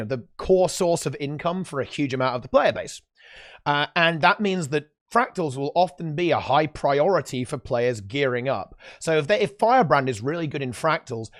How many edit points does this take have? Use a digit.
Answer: 0